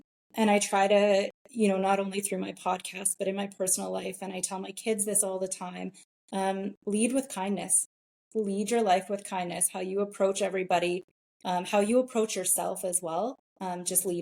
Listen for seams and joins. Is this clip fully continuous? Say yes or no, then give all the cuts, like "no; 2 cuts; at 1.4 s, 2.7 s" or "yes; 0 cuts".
yes; 0 cuts